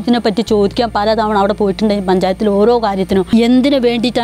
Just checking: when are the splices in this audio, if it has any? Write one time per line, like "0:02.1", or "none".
0:03.3